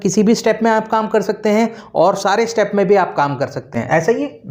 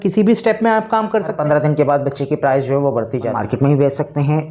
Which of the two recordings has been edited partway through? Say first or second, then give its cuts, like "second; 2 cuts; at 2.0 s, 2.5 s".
second; 2 cuts; at 1.3 s, 3.3 s